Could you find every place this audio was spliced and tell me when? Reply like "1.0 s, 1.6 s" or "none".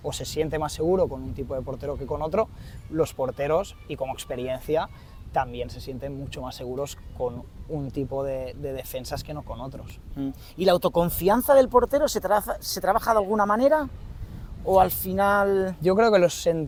none